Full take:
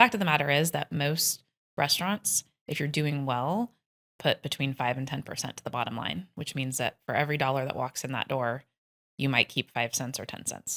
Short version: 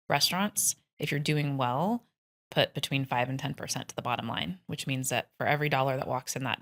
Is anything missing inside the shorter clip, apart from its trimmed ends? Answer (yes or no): no